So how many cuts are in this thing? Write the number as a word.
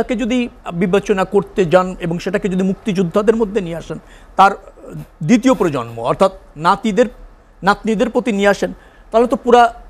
zero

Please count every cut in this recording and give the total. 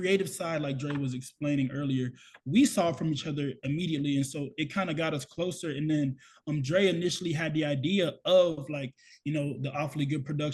zero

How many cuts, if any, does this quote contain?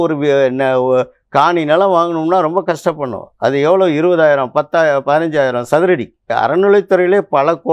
one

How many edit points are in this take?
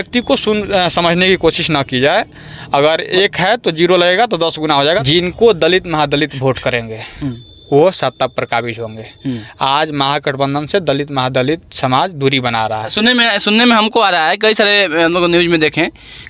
two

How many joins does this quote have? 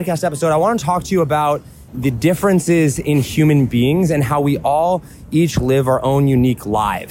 one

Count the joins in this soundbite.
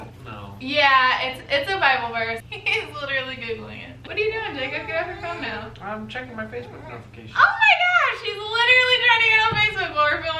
two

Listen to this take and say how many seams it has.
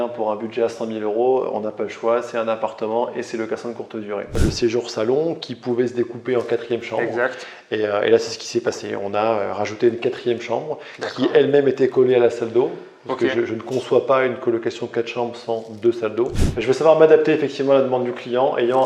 two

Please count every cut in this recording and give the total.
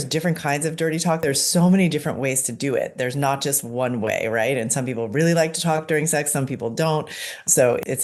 one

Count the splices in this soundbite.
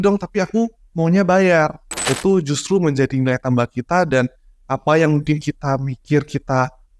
one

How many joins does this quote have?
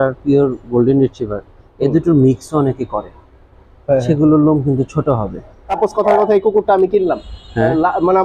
one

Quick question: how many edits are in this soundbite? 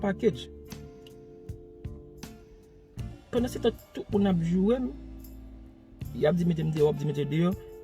zero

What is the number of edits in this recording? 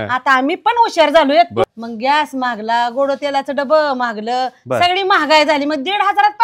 one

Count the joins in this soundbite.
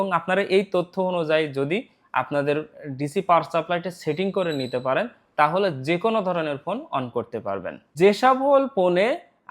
one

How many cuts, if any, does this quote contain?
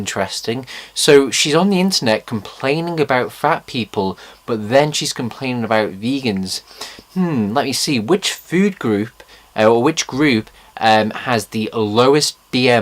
one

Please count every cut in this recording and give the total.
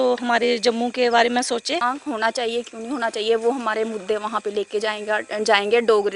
one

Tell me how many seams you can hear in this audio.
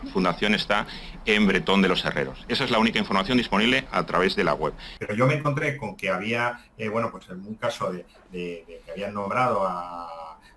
one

